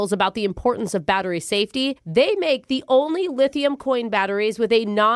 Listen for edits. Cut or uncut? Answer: uncut